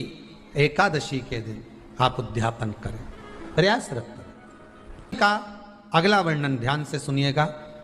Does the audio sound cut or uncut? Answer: cut